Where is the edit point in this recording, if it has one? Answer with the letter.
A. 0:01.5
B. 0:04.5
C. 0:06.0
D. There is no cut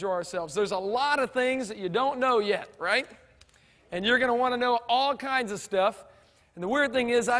B